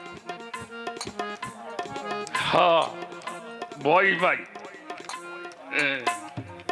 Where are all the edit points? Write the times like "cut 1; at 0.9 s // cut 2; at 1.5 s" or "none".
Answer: none